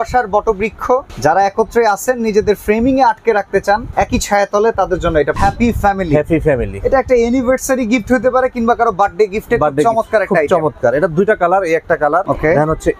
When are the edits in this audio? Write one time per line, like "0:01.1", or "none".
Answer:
0:01.1
0:03.9
0:05.4
0:12.2